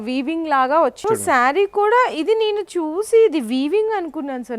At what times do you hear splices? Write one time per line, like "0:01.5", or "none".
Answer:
0:01.0